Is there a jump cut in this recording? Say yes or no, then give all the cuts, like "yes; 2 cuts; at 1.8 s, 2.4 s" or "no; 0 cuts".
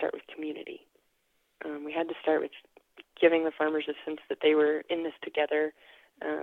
no; 0 cuts